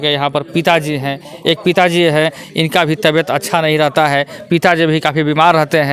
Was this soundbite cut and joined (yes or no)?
no